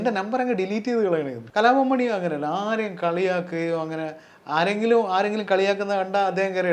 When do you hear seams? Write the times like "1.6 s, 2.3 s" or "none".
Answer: 1.4 s